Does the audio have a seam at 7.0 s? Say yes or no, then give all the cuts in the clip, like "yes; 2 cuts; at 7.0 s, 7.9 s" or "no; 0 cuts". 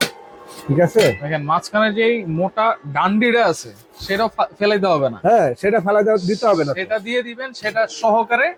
no; 0 cuts